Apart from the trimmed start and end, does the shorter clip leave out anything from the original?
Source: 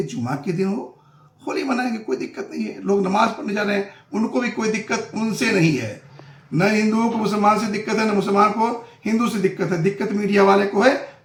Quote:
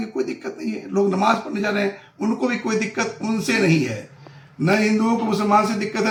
no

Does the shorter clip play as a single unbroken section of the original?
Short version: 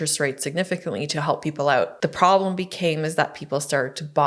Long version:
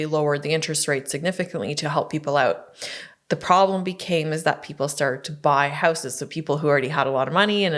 no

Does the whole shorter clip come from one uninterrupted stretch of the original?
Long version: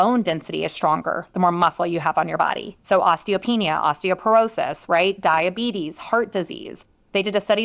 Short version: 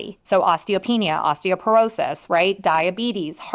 yes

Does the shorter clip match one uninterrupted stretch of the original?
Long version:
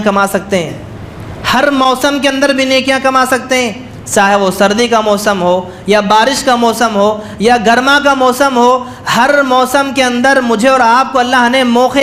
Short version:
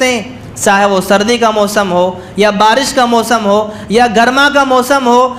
yes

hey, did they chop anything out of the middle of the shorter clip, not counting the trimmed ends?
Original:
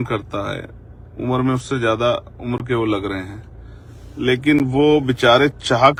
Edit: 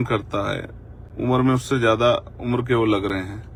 no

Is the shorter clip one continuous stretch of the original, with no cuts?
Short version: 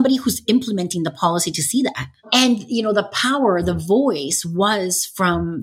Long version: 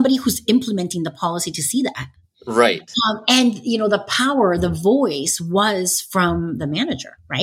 no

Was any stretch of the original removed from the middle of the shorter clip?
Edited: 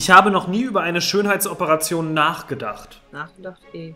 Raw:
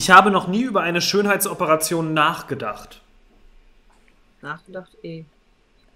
yes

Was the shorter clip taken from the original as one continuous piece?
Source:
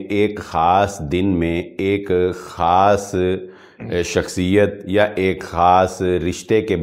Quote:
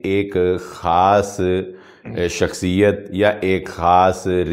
yes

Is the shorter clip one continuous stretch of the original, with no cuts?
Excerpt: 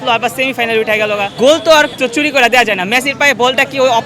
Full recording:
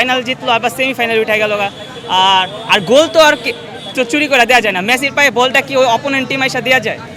no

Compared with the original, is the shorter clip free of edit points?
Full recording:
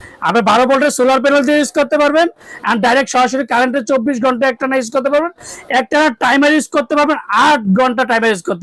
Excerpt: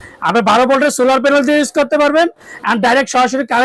yes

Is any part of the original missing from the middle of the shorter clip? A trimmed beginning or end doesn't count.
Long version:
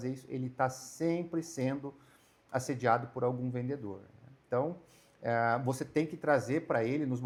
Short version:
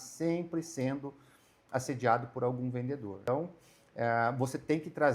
yes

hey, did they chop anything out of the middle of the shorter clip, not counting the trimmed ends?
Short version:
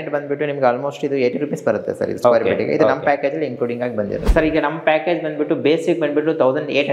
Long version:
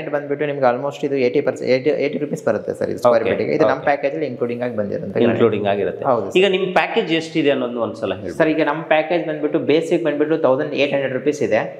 yes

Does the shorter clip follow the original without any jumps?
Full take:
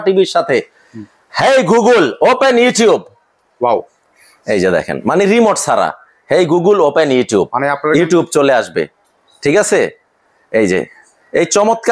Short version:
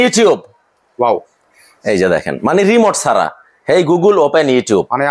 yes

